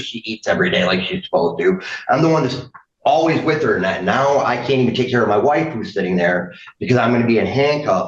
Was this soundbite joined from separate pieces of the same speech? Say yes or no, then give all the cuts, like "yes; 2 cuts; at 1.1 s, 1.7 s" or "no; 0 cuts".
no; 0 cuts